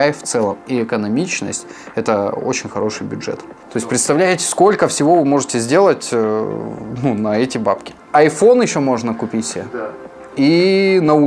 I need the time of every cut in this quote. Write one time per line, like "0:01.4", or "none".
0:03.5
0:07.9